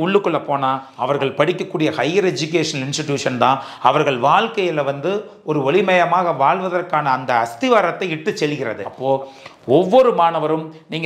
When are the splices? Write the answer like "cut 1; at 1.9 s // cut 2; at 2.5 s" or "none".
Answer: cut 1; at 0.9 s // cut 2; at 8.9 s